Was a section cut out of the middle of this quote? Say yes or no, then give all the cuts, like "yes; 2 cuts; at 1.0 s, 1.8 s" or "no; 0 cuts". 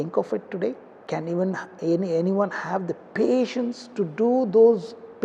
yes; 1 cut; at 0.9 s